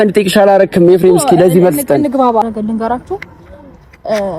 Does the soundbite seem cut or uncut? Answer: cut